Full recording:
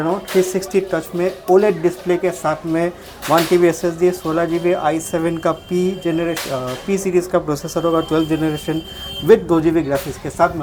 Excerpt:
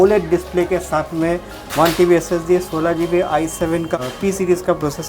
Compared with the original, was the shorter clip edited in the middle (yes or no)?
yes